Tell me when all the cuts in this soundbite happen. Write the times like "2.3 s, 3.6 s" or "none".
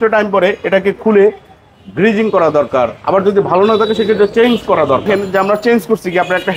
5.0 s

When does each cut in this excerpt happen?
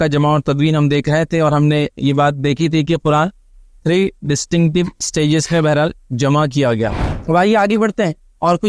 7.0 s

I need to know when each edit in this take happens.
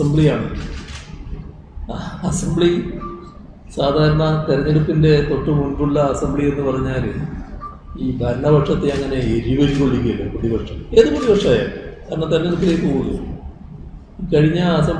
none

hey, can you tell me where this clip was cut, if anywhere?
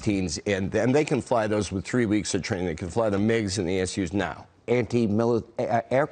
4.5 s

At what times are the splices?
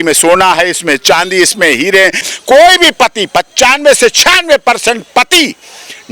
2.2 s

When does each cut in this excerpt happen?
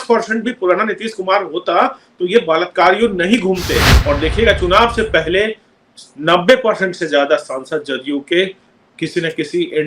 3.9 s

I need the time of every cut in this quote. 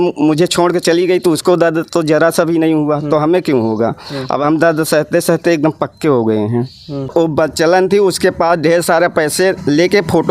7.1 s

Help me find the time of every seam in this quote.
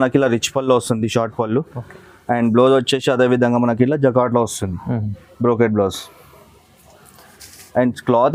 none

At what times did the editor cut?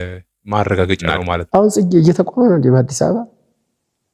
1.4 s

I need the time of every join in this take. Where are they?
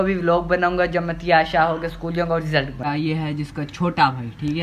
2.7 s

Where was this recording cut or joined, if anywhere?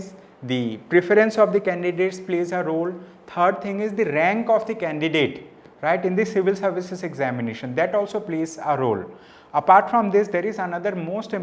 none

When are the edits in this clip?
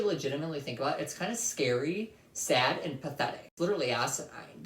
3.5 s

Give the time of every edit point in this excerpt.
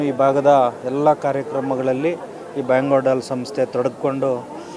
none

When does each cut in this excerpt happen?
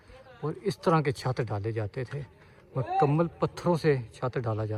none

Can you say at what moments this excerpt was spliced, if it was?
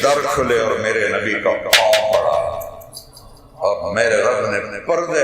none

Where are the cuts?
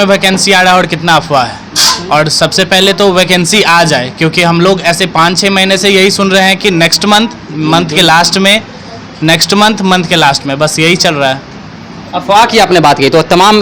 none

